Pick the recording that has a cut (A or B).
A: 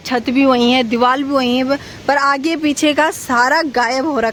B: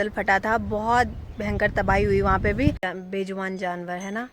B